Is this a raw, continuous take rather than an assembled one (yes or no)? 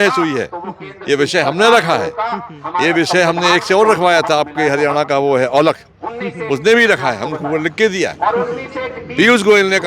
yes